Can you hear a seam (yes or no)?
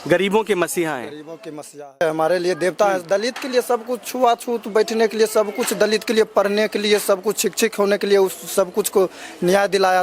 yes